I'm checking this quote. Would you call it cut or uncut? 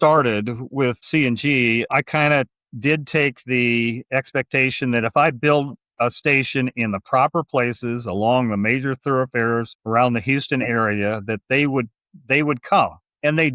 cut